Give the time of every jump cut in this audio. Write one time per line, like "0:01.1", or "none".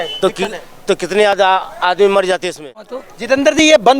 0:03.1